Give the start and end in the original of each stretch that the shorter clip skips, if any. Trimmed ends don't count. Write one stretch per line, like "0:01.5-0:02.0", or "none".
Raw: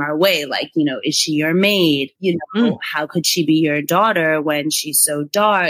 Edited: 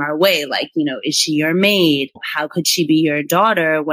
0:02.2-0:02.8